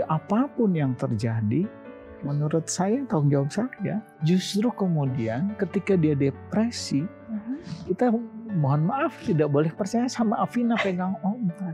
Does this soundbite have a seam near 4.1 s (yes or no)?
yes